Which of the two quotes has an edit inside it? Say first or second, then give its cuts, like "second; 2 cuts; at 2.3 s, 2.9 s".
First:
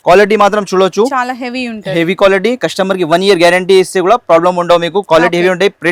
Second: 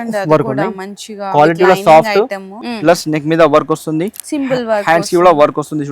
second; 1 cut; at 2.6 s